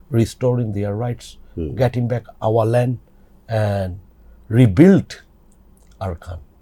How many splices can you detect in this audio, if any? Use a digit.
0